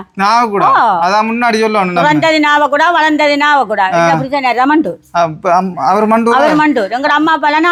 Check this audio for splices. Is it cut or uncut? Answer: uncut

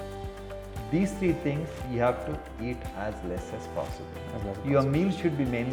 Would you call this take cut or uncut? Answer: uncut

